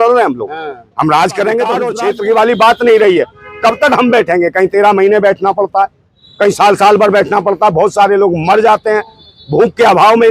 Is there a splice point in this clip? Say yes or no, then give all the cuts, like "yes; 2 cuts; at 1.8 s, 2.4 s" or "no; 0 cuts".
yes; 1 cut; at 1.9 s